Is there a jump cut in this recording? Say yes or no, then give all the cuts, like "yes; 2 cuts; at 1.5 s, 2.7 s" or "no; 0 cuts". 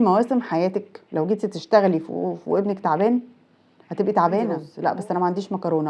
yes; 1 cut; at 4.7 s